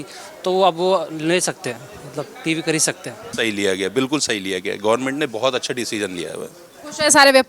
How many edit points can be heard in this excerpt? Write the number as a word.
one